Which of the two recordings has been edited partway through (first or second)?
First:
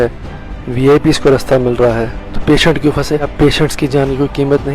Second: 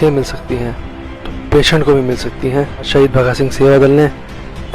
second